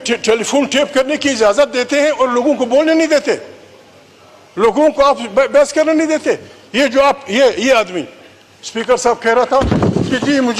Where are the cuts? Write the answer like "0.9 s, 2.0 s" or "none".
none